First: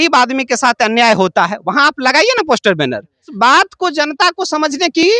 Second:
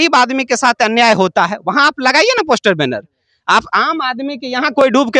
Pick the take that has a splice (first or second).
first